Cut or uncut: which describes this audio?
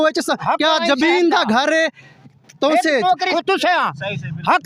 cut